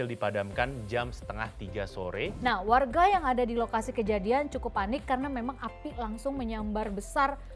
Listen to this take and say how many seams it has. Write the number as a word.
one